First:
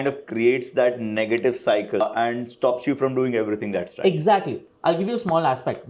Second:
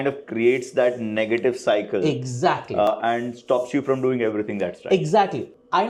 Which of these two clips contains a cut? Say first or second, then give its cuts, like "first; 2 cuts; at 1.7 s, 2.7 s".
first; 2 cuts; at 2.0 s, 4.6 s